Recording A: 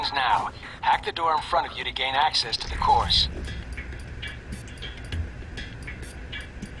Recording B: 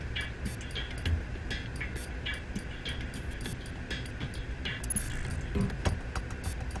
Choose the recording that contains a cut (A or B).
A